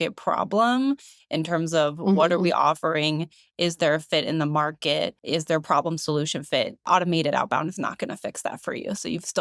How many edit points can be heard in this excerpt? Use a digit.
2